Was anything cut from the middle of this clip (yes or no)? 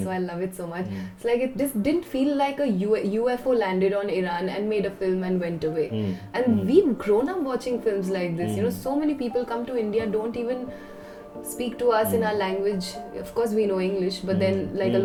no